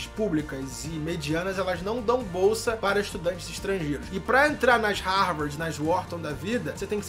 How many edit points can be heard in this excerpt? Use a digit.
0